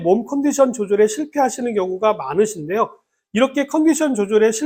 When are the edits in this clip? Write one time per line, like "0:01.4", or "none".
none